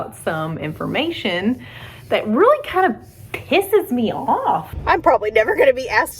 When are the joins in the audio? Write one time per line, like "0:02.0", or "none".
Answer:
0:04.7